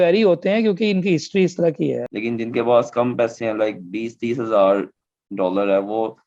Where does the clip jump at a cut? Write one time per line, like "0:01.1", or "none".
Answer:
0:02.0